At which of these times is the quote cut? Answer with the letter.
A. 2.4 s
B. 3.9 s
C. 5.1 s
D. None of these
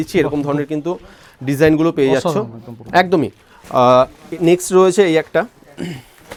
D